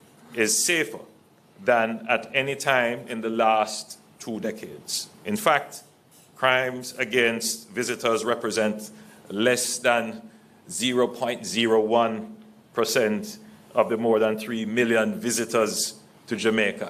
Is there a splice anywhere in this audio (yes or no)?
no